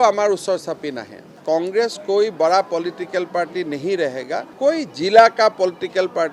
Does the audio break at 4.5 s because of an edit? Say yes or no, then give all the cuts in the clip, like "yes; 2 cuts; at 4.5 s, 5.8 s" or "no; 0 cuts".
yes; 2 cuts; at 1.3 s, 4.5 s